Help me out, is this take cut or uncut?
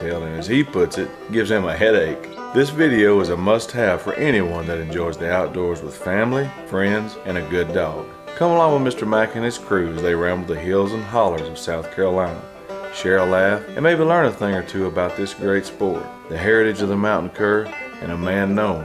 uncut